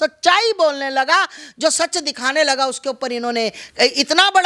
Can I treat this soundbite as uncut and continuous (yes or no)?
yes